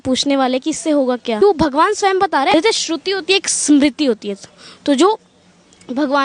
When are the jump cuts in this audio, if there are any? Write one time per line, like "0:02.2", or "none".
0:01.4
0:02.5